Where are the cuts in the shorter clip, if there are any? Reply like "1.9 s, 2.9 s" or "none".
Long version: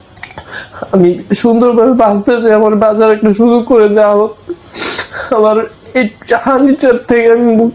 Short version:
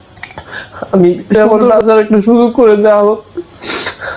1.3 s